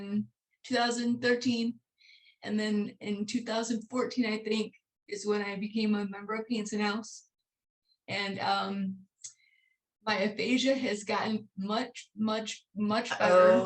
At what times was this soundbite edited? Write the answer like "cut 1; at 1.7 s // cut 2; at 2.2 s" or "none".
none